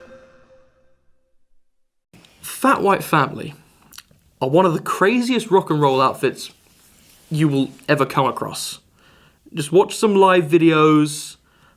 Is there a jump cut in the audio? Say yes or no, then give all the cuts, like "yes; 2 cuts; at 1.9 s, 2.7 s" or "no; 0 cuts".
yes; 1 cut; at 10.5 s